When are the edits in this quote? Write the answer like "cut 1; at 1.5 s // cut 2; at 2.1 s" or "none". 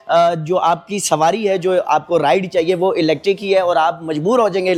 none